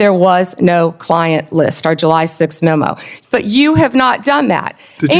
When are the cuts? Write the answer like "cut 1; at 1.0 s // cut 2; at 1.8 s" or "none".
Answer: cut 1; at 3.1 s